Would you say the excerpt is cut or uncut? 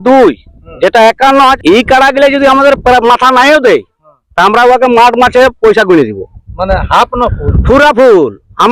cut